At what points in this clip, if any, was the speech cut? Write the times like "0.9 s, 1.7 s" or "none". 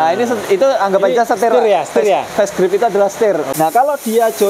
3.5 s